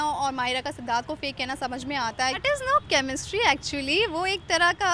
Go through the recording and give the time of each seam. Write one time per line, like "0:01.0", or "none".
0:02.4